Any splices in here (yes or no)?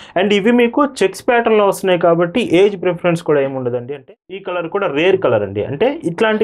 yes